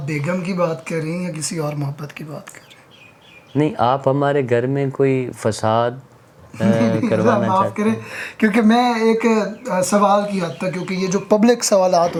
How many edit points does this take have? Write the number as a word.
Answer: zero